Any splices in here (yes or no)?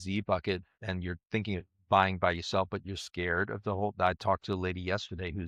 no